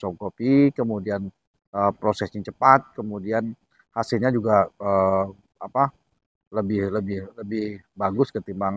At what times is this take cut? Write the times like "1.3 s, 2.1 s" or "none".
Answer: none